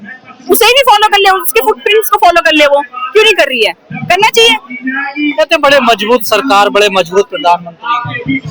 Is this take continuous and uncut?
yes; 0 cuts

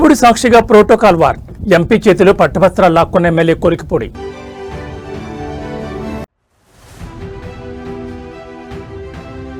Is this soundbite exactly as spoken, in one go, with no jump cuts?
yes; 0 cuts

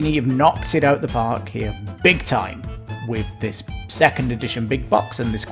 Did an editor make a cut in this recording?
yes; 1 cut; at 3.0 s

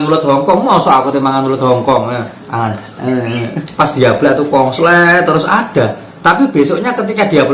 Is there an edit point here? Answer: yes; 1 cut; at 3.6 s

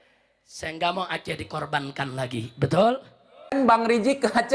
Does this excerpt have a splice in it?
yes; 1 cut; at 3.5 s

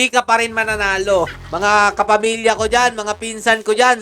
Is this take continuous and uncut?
no; 1 cut; at 1.4 s

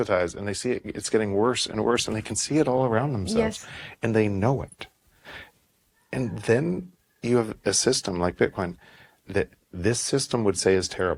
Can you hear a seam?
no; 0 cuts

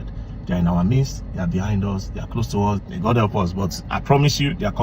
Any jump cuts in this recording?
yes; 1 cut; at 2.8 s

